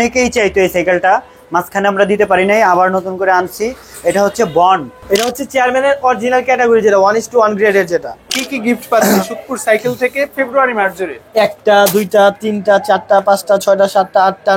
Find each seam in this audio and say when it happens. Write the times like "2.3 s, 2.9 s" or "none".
4.9 s, 8.4 s